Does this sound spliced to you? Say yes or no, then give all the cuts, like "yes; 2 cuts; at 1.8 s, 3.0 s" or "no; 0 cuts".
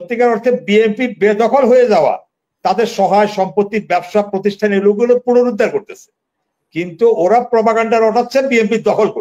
no; 0 cuts